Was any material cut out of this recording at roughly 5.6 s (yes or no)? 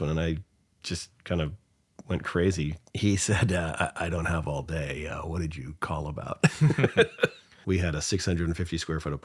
no